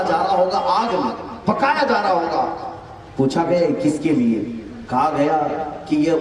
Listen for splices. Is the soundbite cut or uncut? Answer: uncut